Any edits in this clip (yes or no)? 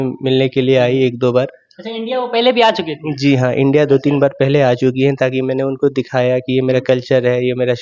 no